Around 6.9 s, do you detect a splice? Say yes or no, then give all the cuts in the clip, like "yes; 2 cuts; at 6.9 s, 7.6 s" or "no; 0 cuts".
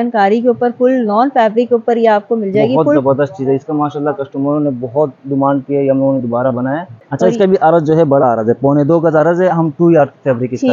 yes; 2 cuts; at 3.0 s, 6.9 s